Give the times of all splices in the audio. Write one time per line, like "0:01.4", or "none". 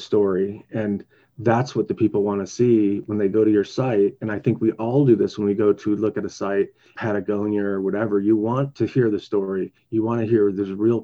0:06.9
0:08.7